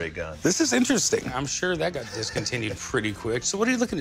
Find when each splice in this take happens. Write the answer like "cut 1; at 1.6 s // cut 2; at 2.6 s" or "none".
cut 1; at 1.3 s